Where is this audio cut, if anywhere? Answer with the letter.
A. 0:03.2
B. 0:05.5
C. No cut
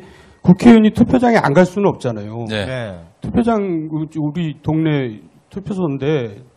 B